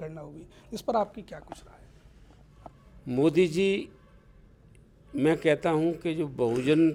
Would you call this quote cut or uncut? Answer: uncut